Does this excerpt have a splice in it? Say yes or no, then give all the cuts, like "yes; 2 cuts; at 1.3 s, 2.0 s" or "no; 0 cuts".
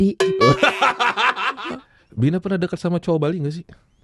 yes; 1 cut; at 1.5 s